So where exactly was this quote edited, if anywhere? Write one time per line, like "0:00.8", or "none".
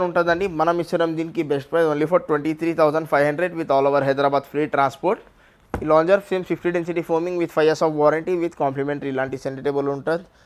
0:05.4